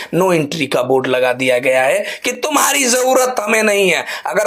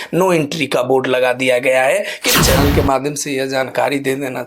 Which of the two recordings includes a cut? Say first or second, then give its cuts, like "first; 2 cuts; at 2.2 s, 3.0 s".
second; 1 cut; at 2.4 s